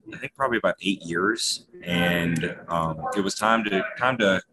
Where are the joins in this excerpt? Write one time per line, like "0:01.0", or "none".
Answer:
none

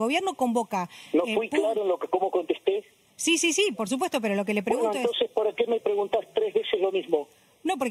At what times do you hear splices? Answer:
none

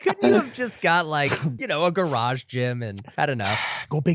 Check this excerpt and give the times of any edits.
0:01.5
0:03.0

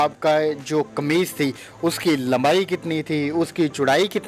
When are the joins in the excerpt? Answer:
none

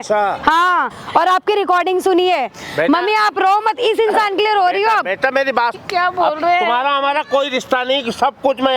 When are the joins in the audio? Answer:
0:01.0
0:05.7

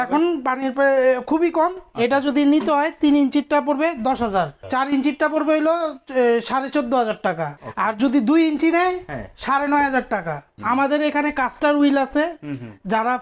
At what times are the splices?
0:04.6
0:07.6
0:10.5

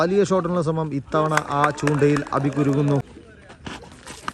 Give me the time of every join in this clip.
0:03.1

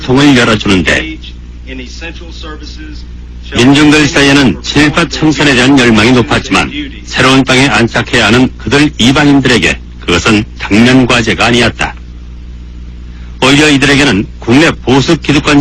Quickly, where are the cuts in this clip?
none

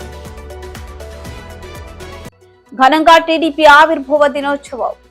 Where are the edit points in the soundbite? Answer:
none

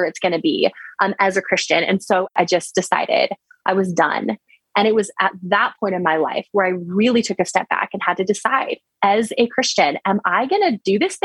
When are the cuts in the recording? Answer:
0:02.3
0:04.6

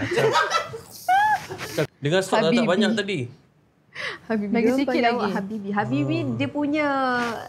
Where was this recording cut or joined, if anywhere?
0:01.9

